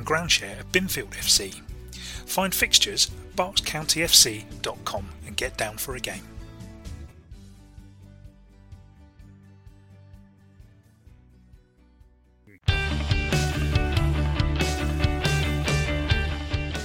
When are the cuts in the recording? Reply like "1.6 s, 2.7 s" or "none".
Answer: 12.4 s